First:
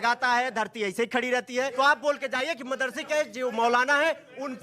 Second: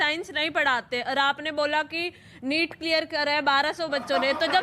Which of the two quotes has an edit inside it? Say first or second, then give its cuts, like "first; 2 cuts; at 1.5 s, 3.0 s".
first; 1 cut; at 1.7 s